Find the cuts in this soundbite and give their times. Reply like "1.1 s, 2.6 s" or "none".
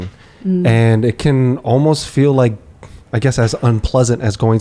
none